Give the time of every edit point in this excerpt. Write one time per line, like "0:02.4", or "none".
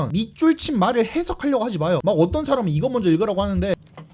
none